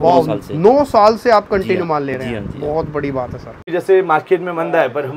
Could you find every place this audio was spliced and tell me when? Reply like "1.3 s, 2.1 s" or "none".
3.7 s